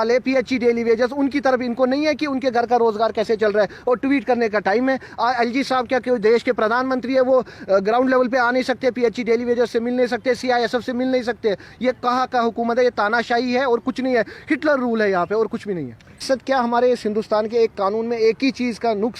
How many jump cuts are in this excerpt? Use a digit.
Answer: 1